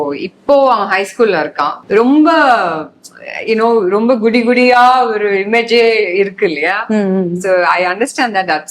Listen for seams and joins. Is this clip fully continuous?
no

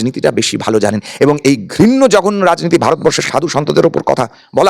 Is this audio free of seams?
yes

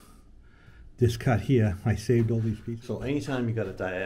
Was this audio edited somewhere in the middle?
yes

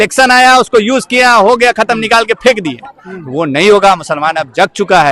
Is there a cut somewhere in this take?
no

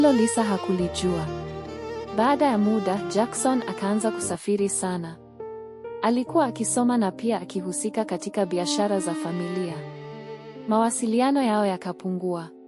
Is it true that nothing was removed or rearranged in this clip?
yes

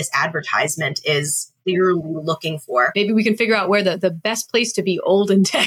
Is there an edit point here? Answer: yes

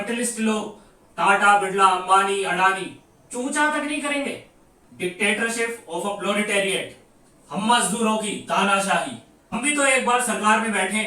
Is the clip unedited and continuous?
no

